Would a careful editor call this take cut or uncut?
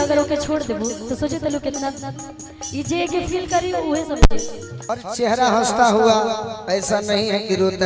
cut